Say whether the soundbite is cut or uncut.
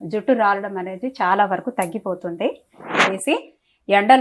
cut